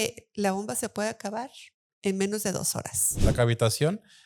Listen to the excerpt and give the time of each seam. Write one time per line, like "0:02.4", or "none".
0:03.2